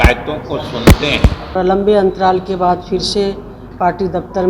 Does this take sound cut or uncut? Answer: cut